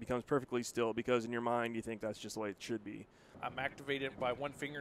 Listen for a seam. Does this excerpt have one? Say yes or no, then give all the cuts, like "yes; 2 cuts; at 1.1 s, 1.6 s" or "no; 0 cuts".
yes; 1 cut; at 3.3 s